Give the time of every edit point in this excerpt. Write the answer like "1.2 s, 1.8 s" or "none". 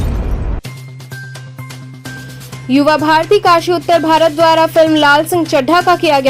2.0 s